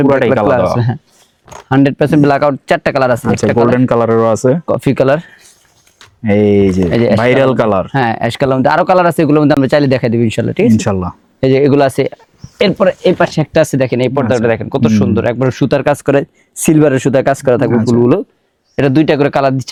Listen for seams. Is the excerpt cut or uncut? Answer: uncut